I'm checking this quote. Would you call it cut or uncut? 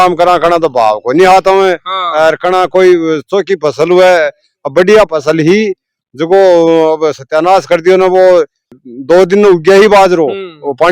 uncut